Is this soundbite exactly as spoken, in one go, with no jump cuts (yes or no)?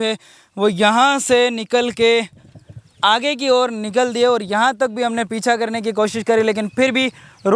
yes